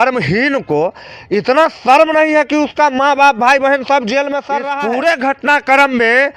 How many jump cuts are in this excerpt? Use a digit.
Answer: 1